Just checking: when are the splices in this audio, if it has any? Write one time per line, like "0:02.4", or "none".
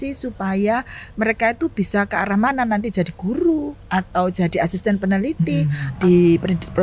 0:05.8